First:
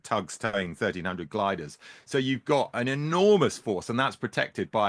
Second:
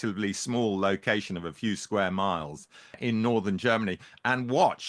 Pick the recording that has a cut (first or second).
second